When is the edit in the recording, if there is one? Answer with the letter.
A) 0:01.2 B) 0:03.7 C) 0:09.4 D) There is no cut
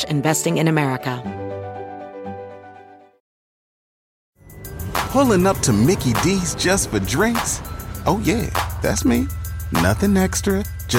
A